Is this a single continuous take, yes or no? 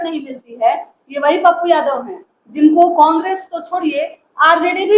yes